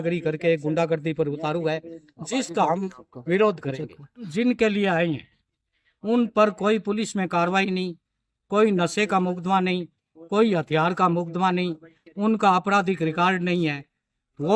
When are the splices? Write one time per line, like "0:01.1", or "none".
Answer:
none